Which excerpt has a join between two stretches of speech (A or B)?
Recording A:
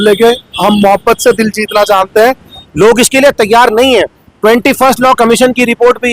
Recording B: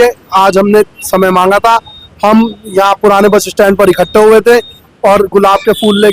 A